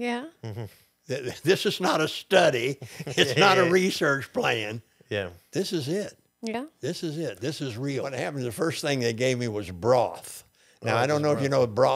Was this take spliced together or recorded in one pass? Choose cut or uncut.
cut